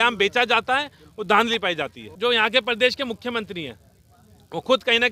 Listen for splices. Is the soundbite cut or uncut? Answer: cut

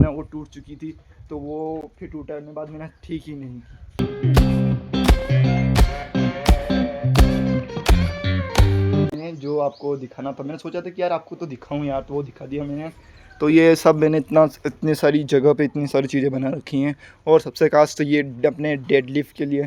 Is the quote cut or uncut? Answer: uncut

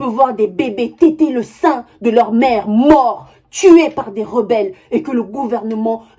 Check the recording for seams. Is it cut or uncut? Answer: uncut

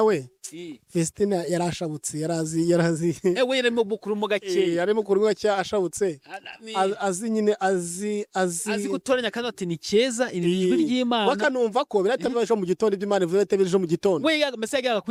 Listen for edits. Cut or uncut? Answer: uncut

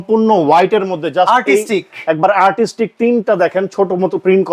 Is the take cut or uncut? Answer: uncut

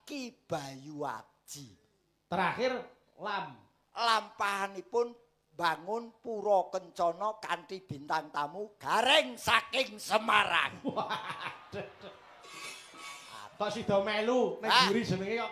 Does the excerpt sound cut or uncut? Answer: uncut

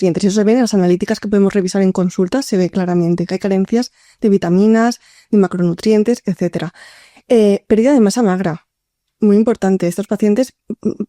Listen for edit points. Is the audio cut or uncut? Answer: uncut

